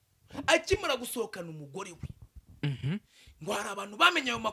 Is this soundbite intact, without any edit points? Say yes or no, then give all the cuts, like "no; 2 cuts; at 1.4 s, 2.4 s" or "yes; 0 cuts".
yes; 0 cuts